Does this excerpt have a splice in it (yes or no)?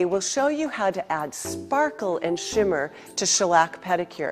no